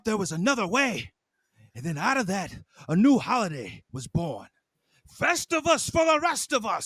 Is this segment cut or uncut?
uncut